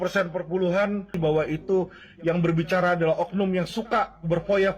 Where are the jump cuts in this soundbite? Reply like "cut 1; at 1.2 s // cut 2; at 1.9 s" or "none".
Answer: cut 1; at 1.2 s

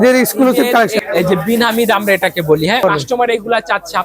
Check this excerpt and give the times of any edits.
cut 1; at 1.0 s // cut 2; at 2.8 s

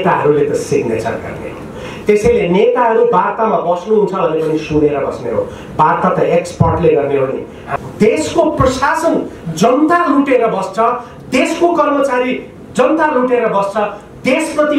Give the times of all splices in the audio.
cut 1; at 7.6 s

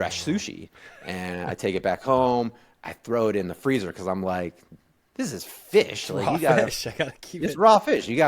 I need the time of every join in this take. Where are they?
none

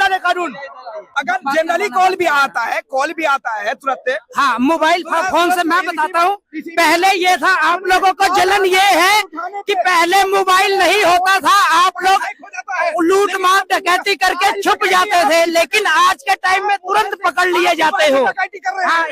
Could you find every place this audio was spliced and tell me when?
cut 1; at 1.1 s

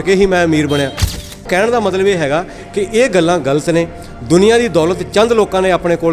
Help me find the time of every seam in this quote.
cut 1; at 1.4 s

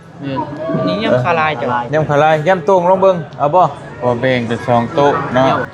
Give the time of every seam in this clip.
cut 1; at 3.9 s

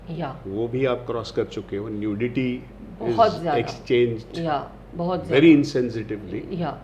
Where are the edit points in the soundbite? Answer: none

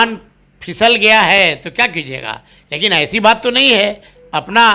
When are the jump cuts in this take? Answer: none

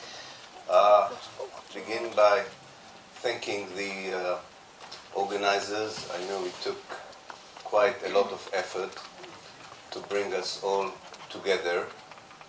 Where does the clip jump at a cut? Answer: none

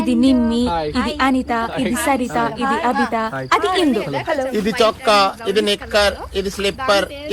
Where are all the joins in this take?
none

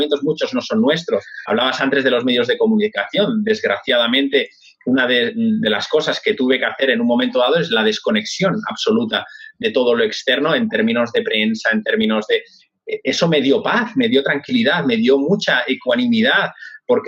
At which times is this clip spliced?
cut 1; at 1.3 s

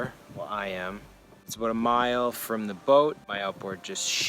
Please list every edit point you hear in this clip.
cut 1; at 1.5 s // cut 2; at 3.2 s

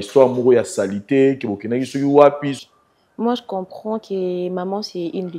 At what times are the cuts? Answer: cut 1; at 2.6 s

